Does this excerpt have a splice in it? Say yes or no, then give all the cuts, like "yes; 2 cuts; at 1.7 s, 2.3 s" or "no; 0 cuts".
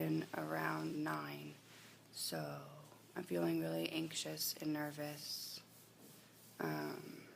yes; 1 cut; at 1.3 s